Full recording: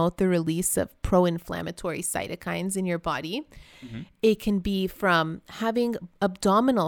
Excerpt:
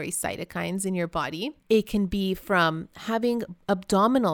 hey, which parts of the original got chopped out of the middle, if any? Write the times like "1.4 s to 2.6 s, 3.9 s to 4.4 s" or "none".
3.5 s to 4.1 s